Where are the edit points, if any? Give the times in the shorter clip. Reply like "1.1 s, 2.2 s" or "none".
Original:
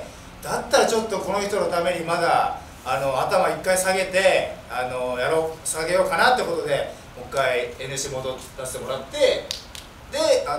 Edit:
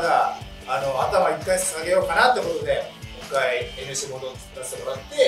1.6 s